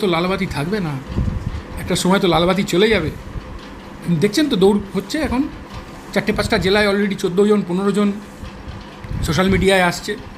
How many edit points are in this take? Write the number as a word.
zero